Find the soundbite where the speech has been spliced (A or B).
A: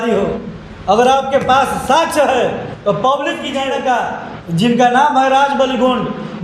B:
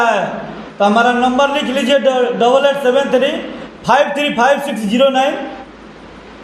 A